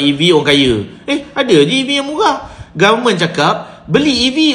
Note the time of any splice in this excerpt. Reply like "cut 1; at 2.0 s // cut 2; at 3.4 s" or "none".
none